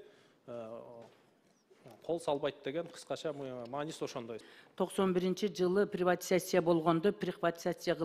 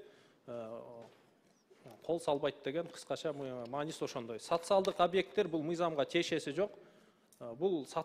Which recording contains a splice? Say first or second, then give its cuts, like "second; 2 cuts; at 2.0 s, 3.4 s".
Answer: first; 1 cut; at 4.4 s